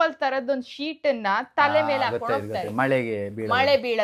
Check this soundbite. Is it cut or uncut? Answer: uncut